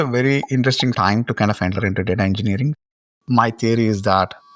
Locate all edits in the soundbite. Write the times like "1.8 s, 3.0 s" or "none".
1.0 s, 3.1 s